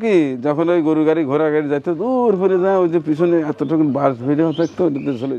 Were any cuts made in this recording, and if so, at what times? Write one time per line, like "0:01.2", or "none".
none

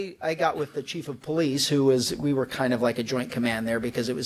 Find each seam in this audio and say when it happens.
none

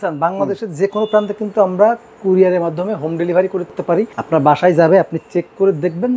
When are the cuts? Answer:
0:03.9

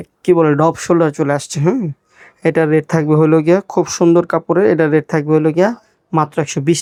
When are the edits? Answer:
none

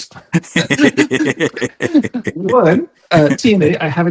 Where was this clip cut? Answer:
0:03.0

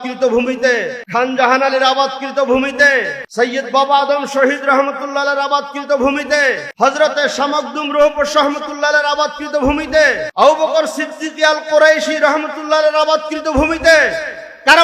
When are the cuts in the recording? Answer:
0:01.0
0:03.2
0:06.7
0:10.2

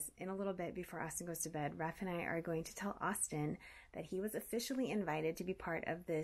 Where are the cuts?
none

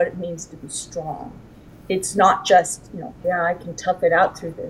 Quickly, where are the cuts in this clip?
0:03.1

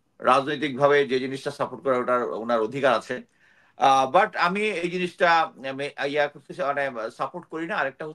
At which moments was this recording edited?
none

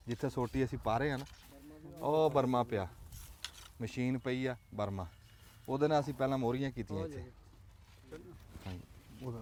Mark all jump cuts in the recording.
none

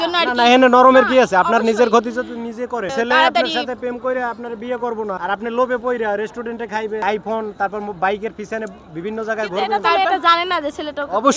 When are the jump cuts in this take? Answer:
0:02.9
0:05.2
0:07.0

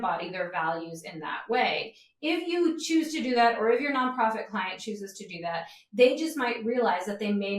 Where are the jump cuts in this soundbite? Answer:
none

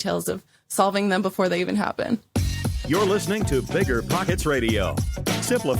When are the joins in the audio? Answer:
0:02.3

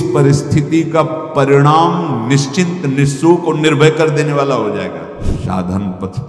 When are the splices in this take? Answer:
0:05.3

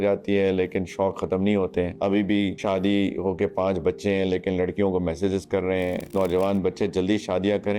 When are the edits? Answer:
0:01.9
0:06.1

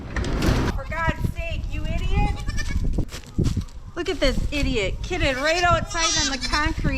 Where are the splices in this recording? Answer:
0:00.7
0:03.1

